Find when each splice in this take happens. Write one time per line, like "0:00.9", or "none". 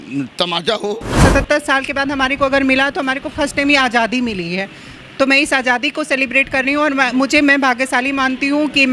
0:01.2